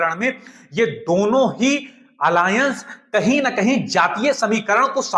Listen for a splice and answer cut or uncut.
uncut